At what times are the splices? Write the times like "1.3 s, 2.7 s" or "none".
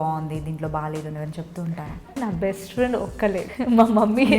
2.2 s, 3.5 s